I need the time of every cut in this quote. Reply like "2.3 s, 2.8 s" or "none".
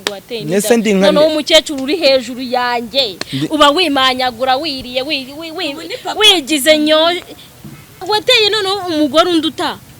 8.0 s